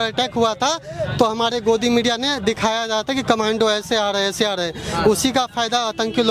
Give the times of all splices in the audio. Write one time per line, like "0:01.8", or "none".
none